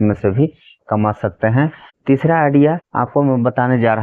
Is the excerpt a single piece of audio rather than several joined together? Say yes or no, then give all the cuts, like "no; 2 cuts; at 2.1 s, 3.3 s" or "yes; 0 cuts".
no; 2 cuts; at 1.9 s, 2.9 s